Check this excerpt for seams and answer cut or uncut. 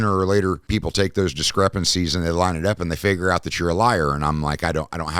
uncut